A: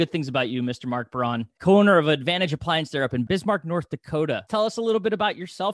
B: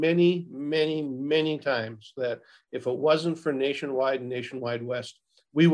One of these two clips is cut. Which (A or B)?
A